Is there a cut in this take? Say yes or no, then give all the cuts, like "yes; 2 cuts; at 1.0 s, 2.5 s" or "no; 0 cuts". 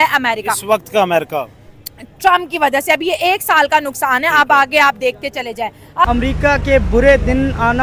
yes; 1 cut; at 6.1 s